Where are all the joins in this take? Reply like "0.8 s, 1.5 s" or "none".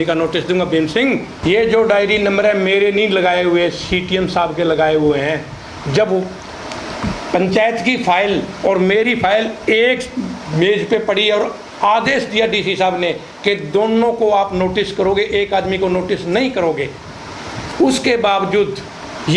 1.3 s